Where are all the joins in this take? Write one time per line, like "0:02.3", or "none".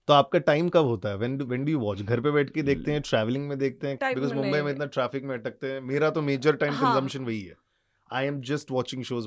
0:04.0